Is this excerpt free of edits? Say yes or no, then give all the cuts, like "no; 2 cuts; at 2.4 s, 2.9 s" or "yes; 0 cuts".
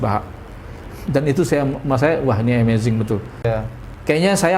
no; 1 cut; at 3.5 s